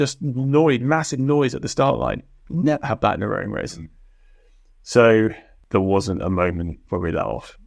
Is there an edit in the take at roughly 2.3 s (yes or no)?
no